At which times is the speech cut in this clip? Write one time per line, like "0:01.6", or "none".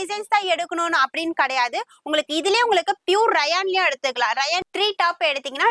0:04.6